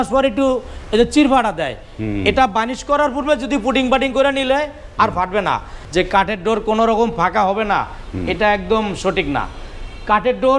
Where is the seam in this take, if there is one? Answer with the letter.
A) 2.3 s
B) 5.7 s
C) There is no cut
B